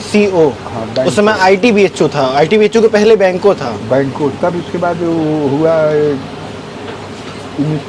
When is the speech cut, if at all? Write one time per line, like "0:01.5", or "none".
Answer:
none